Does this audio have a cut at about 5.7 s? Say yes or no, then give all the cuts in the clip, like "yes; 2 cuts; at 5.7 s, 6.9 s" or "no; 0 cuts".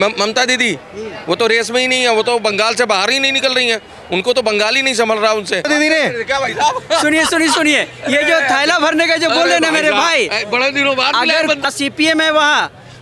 yes; 2 cuts; at 5.7 s, 11.6 s